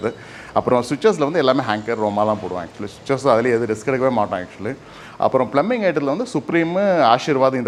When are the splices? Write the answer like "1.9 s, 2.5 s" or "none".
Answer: none